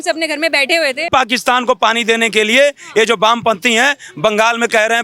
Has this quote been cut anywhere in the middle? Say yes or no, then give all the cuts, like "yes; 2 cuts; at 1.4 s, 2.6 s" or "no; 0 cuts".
yes; 1 cut; at 1.1 s